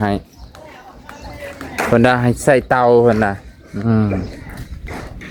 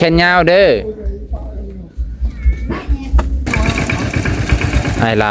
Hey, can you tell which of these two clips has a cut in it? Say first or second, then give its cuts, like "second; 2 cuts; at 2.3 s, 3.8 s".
second; 1 cut; at 3.5 s